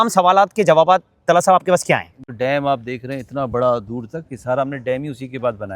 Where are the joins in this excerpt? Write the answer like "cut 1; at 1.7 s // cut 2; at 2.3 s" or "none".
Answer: cut 1; at 2.3 s